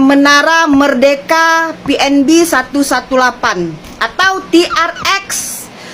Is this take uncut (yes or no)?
yes